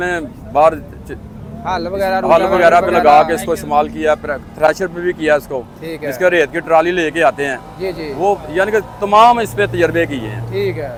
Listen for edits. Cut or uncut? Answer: uncut